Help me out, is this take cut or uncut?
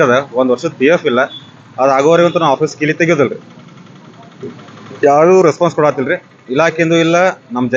uncut